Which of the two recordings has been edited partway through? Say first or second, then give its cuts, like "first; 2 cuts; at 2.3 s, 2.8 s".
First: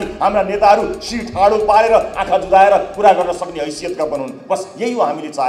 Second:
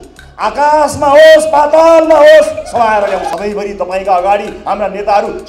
second; 1 cut; at 3.3 s